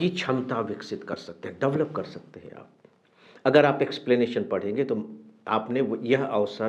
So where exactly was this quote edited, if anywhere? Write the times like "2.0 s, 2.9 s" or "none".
none